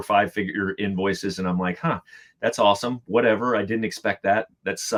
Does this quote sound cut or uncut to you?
uncut